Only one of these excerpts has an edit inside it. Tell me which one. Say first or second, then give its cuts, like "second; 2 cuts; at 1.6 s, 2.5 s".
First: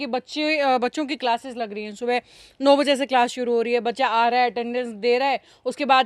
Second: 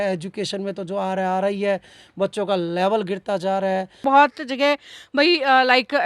second; 1 cut; at 4.0 s